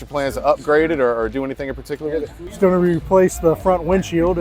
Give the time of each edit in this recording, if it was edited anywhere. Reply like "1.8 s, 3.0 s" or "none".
2.5 s